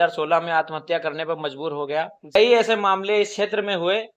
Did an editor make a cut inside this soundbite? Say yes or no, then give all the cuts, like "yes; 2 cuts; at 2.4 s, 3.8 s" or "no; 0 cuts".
yes; 1 cut; at 2.4 s